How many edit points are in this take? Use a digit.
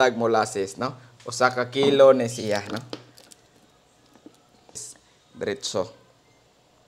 1